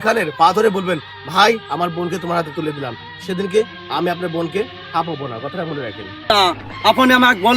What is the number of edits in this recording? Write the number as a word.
one